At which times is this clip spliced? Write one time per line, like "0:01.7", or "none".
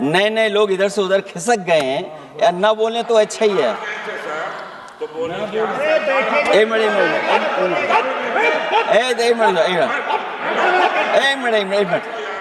none